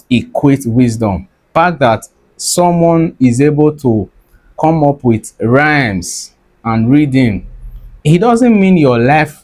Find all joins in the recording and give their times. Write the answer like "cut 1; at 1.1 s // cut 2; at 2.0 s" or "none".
cut 1; at 1.5 s